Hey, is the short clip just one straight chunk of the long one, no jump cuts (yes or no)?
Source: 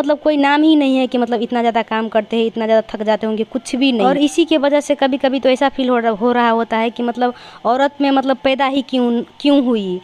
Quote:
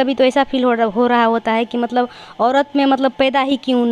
yes